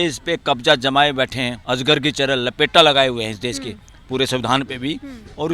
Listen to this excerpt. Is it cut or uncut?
cut